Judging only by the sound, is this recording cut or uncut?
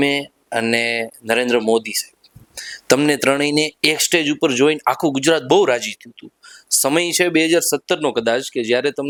uncut